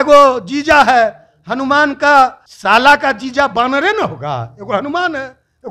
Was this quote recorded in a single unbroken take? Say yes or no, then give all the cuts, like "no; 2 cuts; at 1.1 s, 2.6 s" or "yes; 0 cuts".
no; 1 cut; at 2.5 s